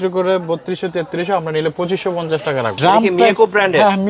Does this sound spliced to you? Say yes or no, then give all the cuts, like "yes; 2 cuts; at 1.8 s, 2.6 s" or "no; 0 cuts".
yes; 1 cut; at 2.7 s